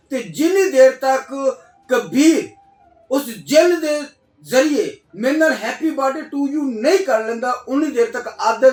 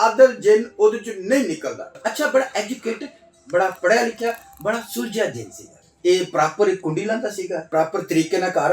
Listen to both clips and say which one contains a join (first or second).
second